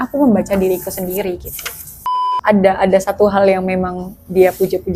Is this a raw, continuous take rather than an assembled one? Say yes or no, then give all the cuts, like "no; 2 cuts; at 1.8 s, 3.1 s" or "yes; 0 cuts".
no; 1 cut; at 2.2 s